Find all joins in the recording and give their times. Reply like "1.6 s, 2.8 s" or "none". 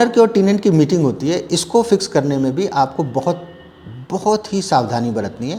none

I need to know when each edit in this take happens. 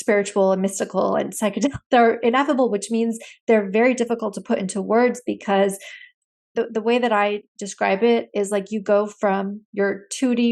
6.5 s

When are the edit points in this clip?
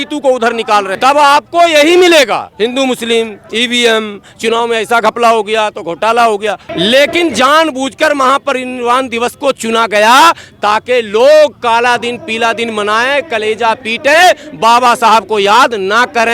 0.9 s, 6.7 s

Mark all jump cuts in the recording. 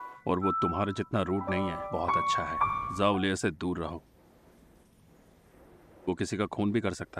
1.8 s, 2.9 s

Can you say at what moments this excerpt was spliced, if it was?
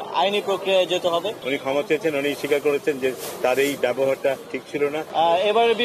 1.4 s, 4.7 s

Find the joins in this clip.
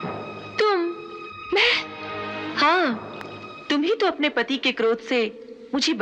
none

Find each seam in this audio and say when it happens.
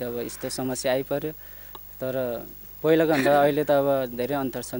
none

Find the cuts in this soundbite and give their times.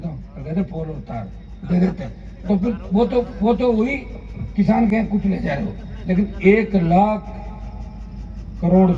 none

